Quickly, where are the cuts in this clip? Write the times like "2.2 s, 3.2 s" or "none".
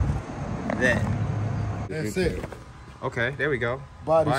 1.9 s

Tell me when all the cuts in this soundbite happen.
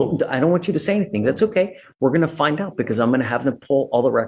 none

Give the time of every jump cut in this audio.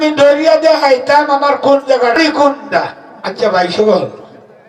2.2 s

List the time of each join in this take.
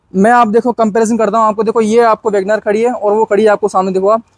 none

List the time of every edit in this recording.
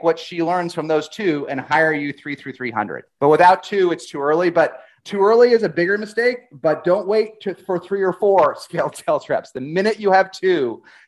3.0 s, 4.9 s

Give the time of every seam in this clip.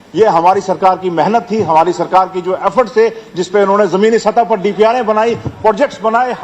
none

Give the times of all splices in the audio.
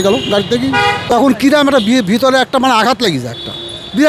1.0 s

